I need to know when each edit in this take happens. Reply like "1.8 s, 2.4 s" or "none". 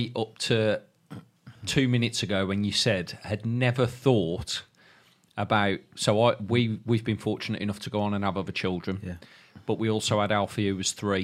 none